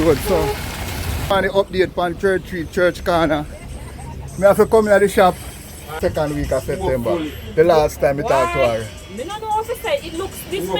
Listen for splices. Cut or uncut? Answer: cut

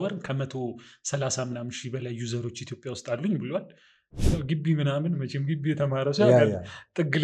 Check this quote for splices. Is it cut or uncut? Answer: cut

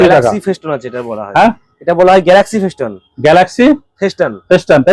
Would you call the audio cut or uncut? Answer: uncut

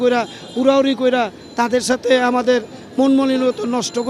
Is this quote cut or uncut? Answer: uncut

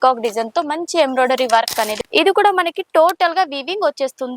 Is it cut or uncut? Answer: cut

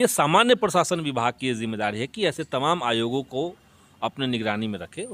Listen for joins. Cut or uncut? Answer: uncut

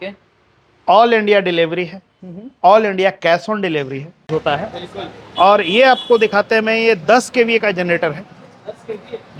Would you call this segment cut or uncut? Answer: cut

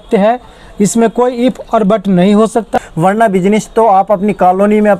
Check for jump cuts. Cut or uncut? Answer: cut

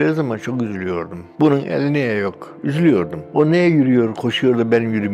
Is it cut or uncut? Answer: uncut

